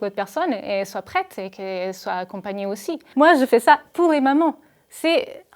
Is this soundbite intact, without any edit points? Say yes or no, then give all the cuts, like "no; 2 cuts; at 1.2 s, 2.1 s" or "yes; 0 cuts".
no; 1 cut; at 3.0 s